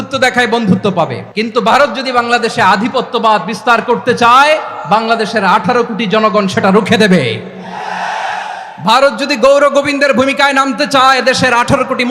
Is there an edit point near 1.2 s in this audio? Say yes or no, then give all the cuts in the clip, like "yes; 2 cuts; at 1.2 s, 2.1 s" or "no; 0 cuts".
yes; 1 cut; at 1.2 s